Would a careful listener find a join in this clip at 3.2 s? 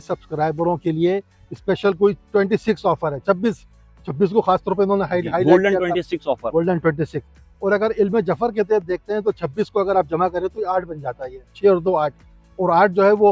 no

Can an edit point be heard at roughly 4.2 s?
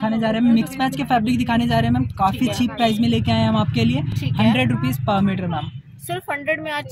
no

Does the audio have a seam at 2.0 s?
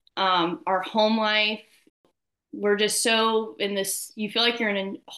yes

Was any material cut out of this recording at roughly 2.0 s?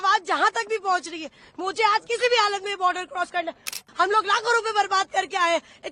no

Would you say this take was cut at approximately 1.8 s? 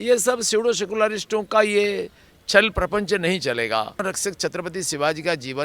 no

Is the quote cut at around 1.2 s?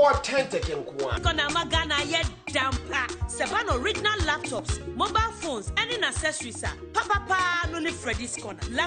yes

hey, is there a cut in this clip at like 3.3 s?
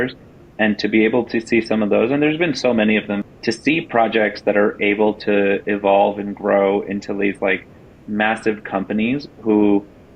yes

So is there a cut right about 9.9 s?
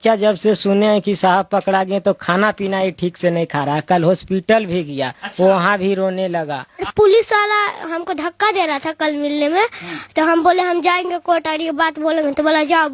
no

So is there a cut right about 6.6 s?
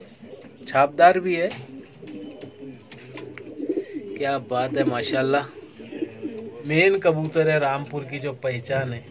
yes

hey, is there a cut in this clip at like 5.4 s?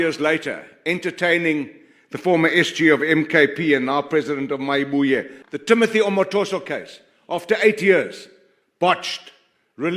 yes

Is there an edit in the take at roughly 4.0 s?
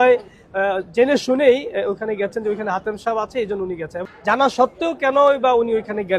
yes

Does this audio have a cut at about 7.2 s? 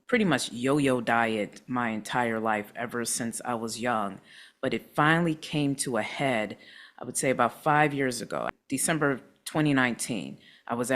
no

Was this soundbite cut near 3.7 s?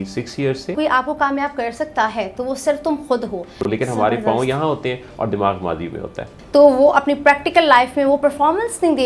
yes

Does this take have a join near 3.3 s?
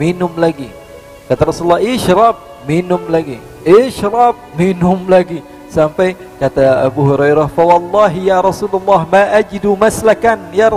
no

